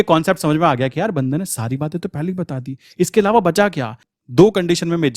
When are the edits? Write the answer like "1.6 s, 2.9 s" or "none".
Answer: 4.0 s

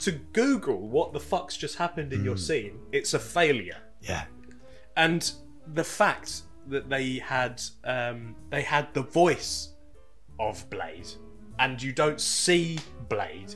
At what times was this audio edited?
8.3 s

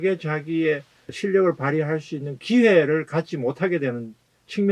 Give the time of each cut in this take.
1.2 s

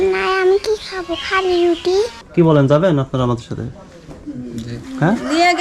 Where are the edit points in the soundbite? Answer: 2.2 s

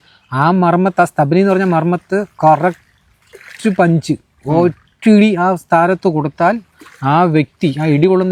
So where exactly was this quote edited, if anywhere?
none

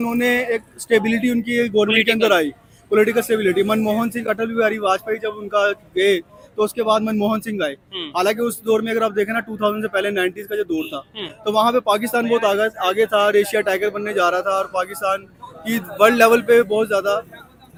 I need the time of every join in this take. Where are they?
none

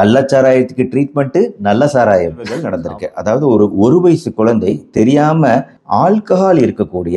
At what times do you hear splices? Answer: 2.7 s

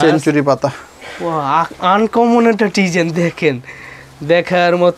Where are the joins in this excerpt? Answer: none

